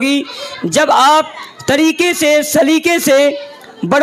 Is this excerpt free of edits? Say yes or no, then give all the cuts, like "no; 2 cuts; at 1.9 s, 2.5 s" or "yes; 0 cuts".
yes; 0 cuts